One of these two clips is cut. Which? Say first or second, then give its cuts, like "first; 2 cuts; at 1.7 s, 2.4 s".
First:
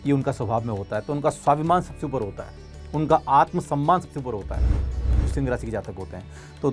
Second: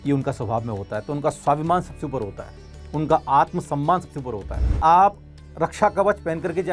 second; 1 cut; at 4.8 s